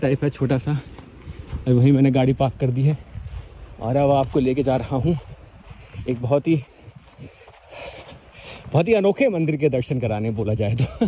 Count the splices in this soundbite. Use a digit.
0